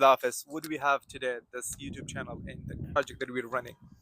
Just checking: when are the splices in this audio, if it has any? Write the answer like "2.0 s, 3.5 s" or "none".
3.0 s

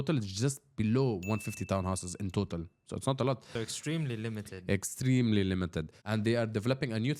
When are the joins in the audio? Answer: 3.5 s, 6.0 s

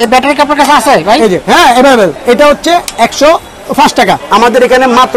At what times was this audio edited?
2.2 s, 4.2 s

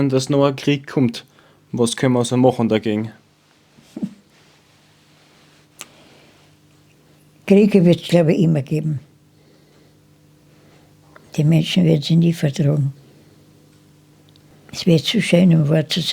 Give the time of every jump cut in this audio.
14.5 s

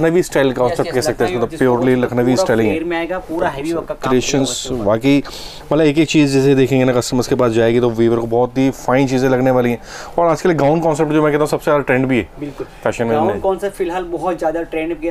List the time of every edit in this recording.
none

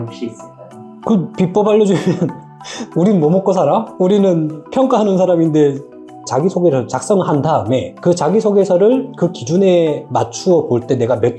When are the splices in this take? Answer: 6.0 s

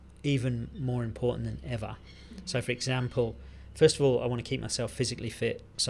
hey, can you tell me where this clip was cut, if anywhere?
none

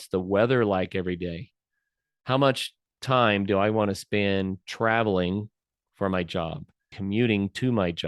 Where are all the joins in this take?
6.9 s

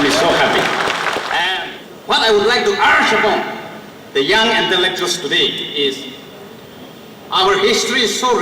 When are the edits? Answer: 1.5 s

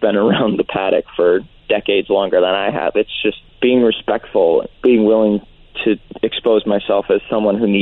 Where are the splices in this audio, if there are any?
3.5 s, 4.7 s, 6.1 s

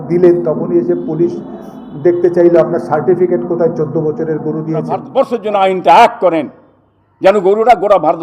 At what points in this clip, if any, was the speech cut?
5.1 s

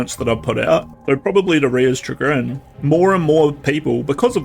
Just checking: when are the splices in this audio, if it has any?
0.9 s, 2.6 s

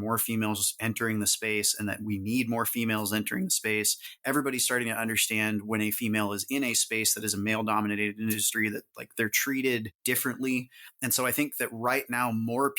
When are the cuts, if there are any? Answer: 9.9 s

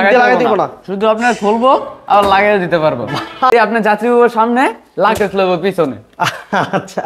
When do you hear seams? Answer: 3.5 s

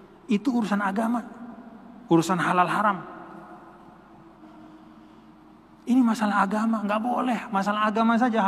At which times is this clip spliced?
4.4 s

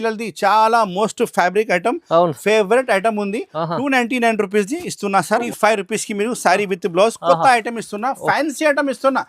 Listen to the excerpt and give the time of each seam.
5.5 s

